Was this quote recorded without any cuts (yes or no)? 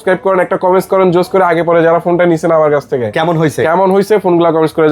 yes